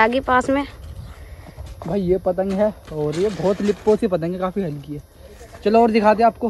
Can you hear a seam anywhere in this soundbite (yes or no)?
no